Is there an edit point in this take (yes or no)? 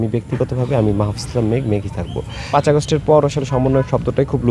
yes